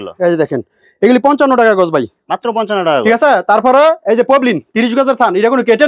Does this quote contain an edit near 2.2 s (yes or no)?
no